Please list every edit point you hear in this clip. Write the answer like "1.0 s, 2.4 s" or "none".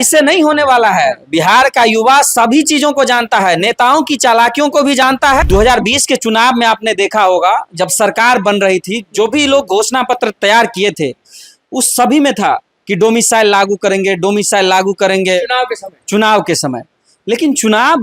5.0 s